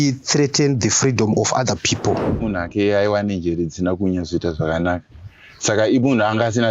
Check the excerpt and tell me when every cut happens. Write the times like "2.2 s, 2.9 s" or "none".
2.4 s